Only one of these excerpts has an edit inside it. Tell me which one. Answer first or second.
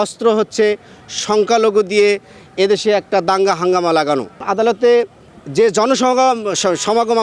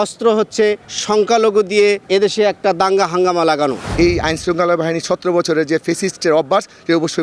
second